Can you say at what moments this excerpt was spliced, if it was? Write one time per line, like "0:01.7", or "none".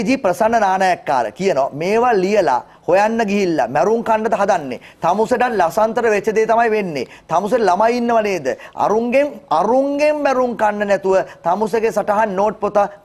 none